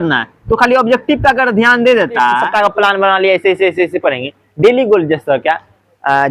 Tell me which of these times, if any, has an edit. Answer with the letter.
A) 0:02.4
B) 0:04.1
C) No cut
A